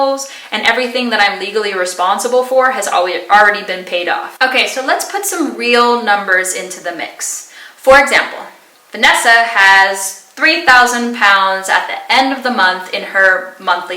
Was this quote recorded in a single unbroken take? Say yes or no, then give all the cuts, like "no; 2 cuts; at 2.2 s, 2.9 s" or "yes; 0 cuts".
yes; 0 cuts